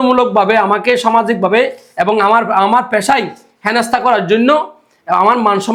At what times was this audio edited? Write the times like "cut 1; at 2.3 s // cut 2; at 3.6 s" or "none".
none